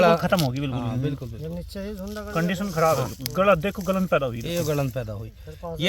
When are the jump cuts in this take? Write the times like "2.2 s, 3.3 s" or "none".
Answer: none